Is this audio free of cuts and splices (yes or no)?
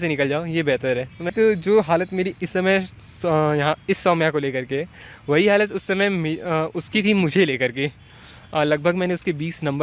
no